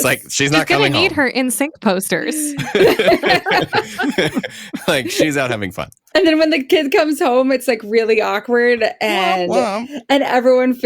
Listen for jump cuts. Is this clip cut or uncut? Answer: cut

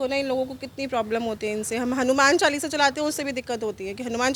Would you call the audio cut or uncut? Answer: uncut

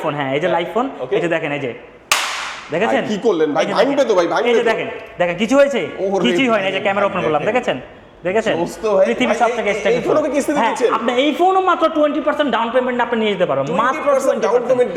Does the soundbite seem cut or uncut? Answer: uncut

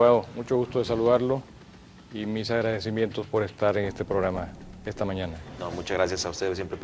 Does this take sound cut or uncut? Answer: uncut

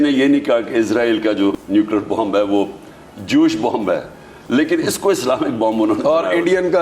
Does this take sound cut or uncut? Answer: cut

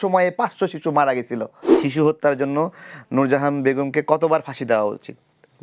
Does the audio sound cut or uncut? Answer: cut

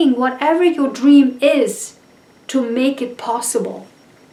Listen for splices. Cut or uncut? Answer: uncut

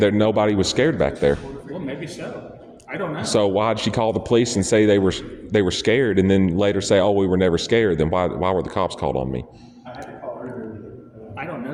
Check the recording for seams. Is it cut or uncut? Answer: uncut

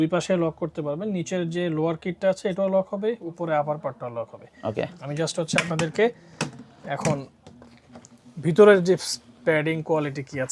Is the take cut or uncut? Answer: uncut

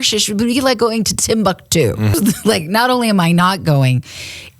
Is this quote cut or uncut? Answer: cut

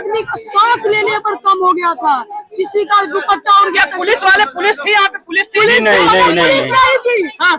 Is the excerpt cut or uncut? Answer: uncut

